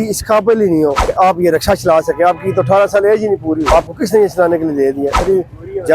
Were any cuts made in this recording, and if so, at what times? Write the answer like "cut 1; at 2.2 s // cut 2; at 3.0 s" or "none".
cut 1; at 1.0 s // cut 2; at 3.6 s // cut 3; at 5.2 s